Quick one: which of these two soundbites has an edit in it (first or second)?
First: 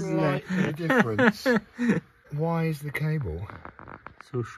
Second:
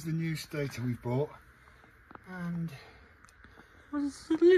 first